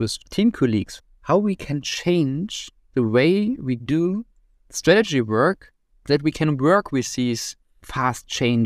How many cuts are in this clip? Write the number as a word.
one